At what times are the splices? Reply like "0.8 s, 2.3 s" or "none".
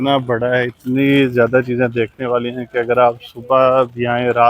none